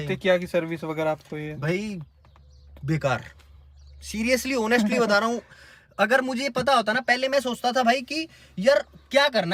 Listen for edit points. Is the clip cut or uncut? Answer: uncut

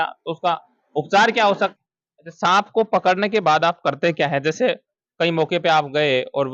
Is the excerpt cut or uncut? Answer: cut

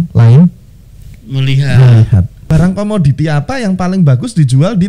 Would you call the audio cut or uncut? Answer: cut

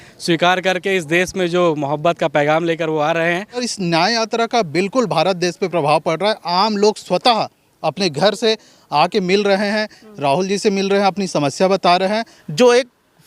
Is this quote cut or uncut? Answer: cut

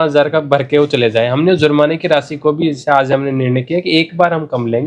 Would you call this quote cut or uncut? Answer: uncut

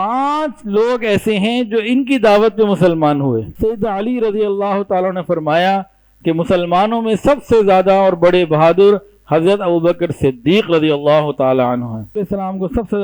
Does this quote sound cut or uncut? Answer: cut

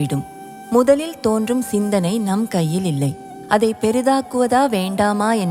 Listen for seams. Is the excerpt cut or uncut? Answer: uncut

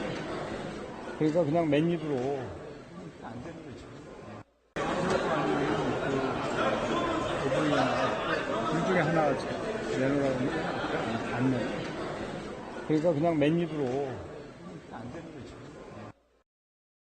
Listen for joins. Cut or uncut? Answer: cut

